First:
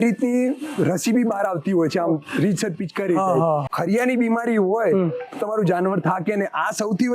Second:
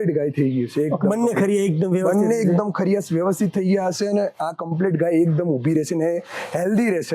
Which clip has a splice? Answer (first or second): first